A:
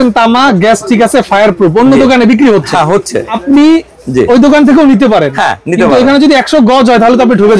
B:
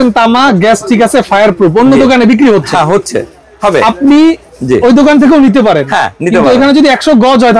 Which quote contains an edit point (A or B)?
A